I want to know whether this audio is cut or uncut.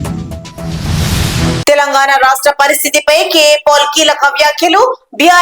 cut